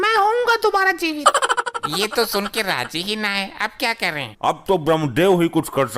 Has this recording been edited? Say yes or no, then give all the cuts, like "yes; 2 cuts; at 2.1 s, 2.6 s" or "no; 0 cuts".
no; 0 cuts